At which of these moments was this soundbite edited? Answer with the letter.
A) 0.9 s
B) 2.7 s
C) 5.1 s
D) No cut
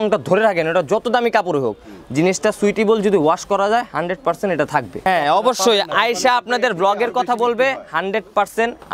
C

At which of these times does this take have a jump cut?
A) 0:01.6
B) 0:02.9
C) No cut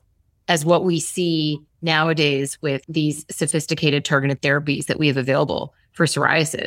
B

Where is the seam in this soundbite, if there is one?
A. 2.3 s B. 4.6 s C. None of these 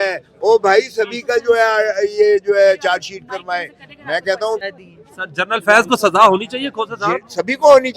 B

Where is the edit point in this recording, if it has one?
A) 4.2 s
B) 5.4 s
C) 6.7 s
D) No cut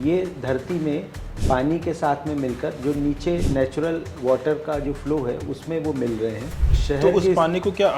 C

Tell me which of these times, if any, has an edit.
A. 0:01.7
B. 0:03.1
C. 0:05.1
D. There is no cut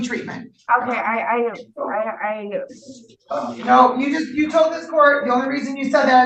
D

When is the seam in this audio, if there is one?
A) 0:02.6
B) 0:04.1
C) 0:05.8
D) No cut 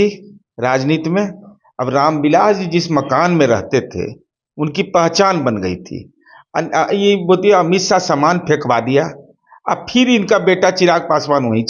D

